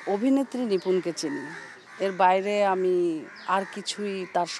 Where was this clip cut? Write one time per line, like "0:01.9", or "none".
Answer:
none